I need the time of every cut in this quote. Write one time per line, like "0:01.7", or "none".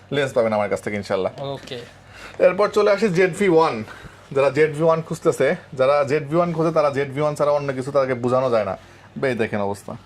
none